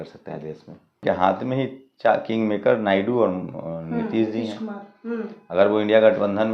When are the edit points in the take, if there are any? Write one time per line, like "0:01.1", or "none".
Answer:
0:01.0